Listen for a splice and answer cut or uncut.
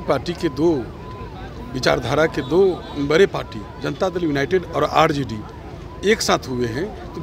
uncut